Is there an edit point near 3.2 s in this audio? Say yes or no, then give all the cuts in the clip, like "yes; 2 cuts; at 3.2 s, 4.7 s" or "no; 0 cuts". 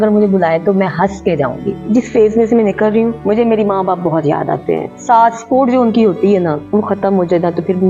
yes; 4 cuts; at 1.8 s, 3.2 s, 4.9 s, 6.6 s